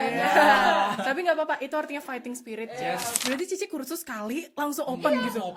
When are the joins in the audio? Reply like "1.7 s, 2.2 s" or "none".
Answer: 3.2 s